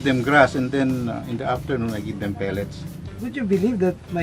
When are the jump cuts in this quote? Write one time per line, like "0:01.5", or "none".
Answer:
0:03.1